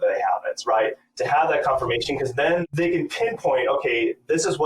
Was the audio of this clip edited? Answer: yes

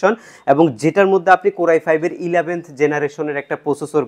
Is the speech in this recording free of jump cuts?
yes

